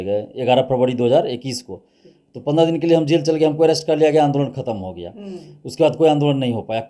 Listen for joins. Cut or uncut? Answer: uncut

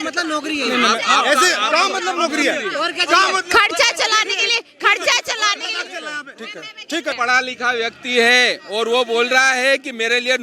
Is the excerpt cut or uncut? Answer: cut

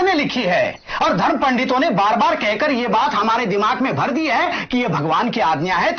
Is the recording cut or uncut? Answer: uncut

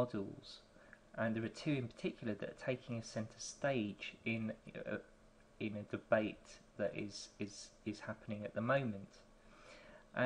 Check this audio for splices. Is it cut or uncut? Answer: cut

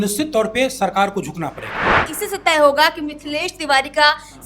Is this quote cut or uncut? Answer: cut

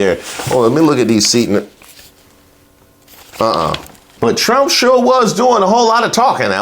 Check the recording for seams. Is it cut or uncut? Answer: cut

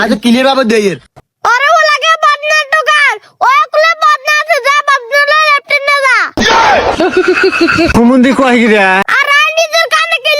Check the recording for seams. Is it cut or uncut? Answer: cut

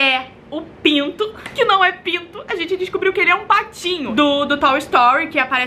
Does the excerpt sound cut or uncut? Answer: cut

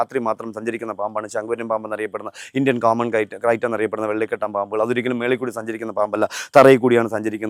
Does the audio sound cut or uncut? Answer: uncut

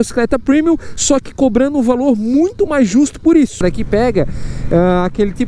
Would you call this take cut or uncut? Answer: cut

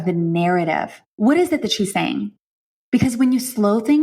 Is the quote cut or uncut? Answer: cut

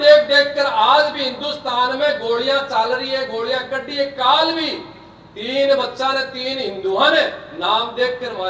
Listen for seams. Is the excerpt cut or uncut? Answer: uncut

